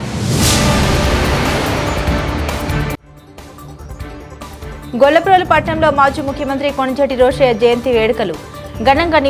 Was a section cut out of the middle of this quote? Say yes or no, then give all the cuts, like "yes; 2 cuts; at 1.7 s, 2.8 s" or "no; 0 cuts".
yes; 1 cut; at 3.9 s